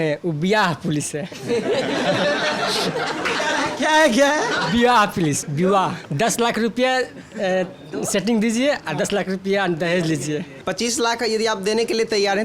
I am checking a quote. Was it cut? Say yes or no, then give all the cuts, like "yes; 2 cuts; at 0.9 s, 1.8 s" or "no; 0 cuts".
yes; 2 cuts; at 6.0 s, 10.6 s